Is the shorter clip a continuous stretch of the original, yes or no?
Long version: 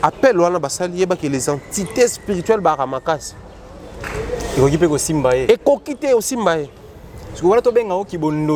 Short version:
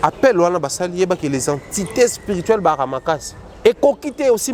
no